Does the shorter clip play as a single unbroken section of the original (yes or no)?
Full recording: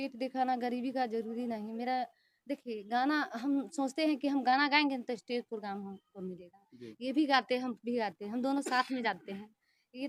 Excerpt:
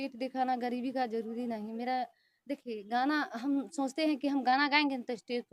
yes